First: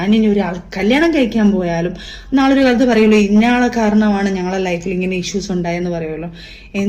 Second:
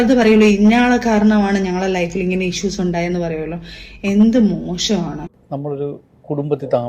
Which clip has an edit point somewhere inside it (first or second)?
second